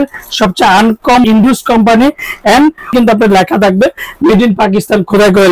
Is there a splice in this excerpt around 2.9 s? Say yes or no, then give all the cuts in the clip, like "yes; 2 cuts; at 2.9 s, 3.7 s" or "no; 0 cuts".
yes; 2 cuts; at 1.2 s, 2.9 s